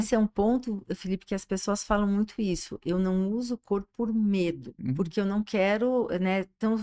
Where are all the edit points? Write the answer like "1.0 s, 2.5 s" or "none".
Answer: 4.7 s